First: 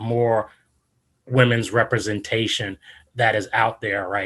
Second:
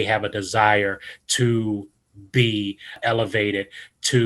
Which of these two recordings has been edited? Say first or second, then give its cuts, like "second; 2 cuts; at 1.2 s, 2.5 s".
second; 1 cut; at 3.0 s